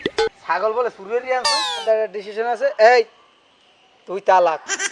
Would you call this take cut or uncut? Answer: cut